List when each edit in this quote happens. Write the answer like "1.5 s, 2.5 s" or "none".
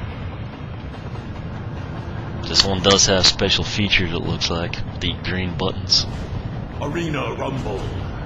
2.0 s

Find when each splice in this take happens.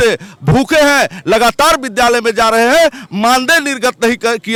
none

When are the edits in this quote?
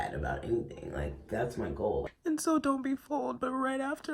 2.1 s

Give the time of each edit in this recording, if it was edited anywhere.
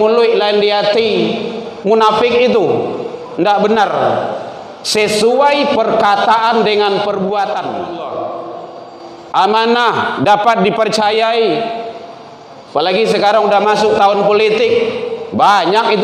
7.8 s

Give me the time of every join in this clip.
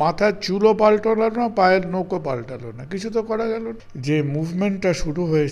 3.9 s

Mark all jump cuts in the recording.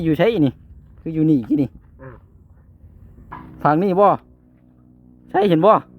3.3 s

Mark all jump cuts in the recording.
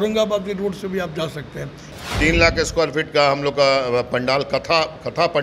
2.0 s

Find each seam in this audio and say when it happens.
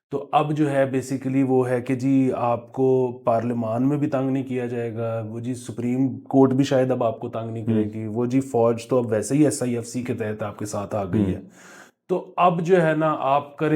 none

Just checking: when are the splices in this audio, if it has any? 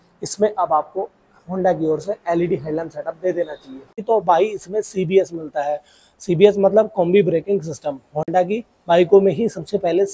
3.9 s

